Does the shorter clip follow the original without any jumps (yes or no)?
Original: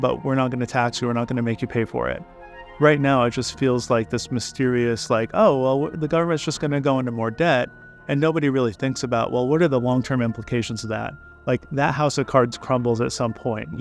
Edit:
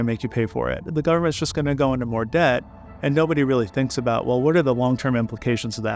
no